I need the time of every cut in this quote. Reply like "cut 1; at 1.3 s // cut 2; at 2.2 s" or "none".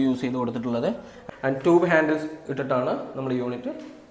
cut 1; at 1.1 s